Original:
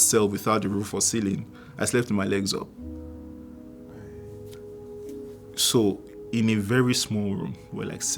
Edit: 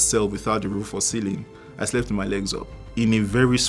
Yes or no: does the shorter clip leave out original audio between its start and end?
yes